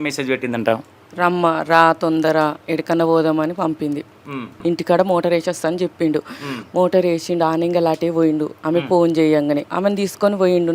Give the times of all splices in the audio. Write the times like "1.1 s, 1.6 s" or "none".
2.6 s, 4.5 s, 9.7 s